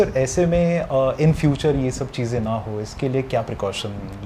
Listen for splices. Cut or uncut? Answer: uncut